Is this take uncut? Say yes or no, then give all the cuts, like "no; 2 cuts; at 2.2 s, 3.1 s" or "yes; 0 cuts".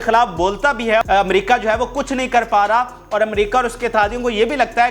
no; 1 cut; at 1.0 s